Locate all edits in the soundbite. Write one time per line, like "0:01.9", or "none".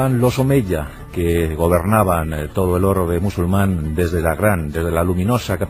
none